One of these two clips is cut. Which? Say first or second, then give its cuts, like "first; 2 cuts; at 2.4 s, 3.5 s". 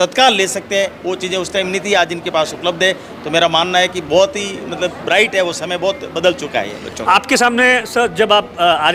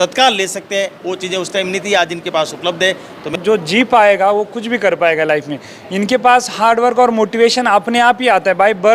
second; 1 cut; at 3.3 s